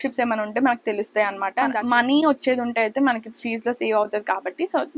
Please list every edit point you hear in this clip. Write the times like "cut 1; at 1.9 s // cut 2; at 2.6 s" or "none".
cut 1; at 1.7 s